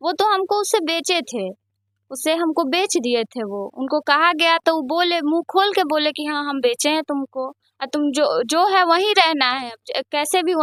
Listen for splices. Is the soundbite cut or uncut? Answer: uncut